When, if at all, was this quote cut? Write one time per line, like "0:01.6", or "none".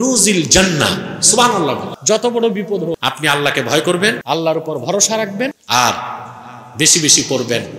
0:01.9
0:03.0
0:04.2
0:05.6